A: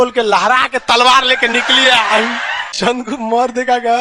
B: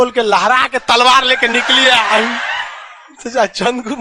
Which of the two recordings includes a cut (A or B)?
A